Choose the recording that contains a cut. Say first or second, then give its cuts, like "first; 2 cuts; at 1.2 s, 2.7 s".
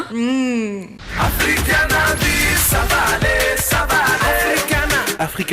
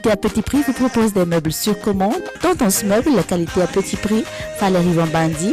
first; 1 cut; at 1.0 s